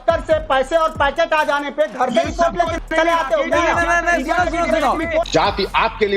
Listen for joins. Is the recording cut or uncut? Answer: cut